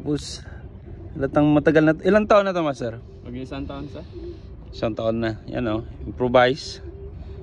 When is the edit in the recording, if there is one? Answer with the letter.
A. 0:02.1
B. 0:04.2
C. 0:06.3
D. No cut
D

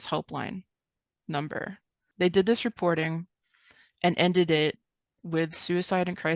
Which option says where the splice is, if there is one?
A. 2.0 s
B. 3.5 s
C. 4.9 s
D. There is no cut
A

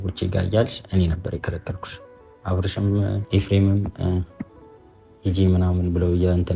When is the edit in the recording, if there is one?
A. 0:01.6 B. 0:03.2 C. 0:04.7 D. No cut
B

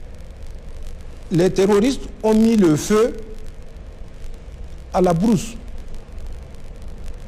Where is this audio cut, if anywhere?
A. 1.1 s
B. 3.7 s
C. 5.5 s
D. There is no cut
D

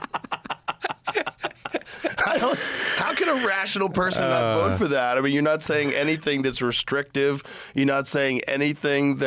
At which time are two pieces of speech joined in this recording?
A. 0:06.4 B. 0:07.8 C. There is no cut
C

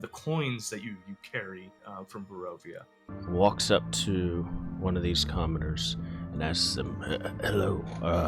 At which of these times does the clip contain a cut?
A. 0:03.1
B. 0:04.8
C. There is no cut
A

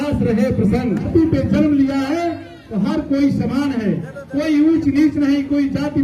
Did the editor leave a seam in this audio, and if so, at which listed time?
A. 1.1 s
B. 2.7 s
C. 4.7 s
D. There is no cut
A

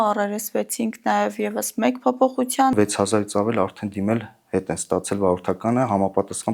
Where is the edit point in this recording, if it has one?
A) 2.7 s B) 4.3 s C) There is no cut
A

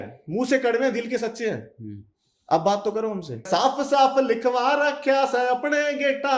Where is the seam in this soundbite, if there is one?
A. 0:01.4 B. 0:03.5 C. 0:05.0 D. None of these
B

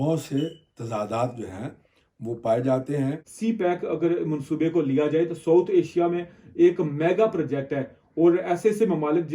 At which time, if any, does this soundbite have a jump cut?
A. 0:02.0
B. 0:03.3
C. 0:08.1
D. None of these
B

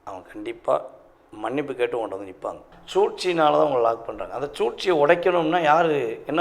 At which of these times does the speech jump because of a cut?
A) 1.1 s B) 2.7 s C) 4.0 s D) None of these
B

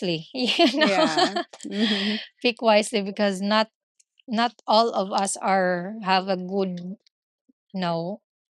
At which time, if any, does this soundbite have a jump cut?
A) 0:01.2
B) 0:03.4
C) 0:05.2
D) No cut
D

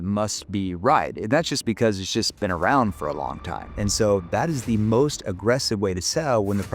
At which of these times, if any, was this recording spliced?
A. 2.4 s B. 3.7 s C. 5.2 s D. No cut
B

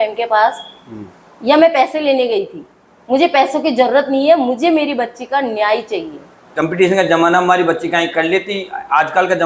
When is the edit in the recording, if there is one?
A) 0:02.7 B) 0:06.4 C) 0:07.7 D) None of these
B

